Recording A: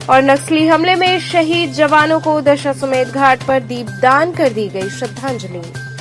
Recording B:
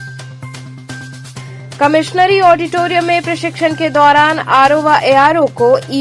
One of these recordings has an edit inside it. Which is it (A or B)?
B